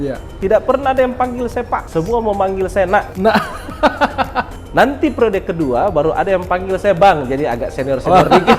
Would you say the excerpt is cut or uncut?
cut